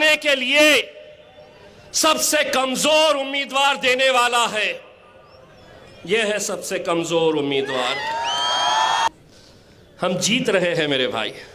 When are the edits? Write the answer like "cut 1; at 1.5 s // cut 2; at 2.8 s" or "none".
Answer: cut 1; at 9.1 s